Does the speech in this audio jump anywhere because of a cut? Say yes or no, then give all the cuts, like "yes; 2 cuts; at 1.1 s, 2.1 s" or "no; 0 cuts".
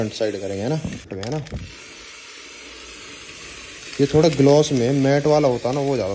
yes; 1 cut; at 1.1 s